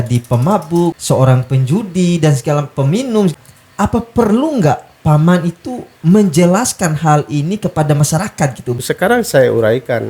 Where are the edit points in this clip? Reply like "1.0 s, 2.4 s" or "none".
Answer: 1.0 s, 3.3 s, 8.8 s